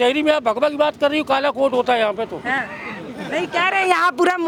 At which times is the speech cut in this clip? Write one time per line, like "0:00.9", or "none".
none